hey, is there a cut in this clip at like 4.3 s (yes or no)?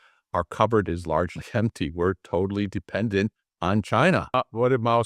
yes